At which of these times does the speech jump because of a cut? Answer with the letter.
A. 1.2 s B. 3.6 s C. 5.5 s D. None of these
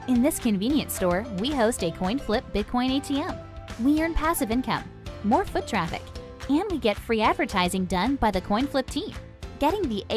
C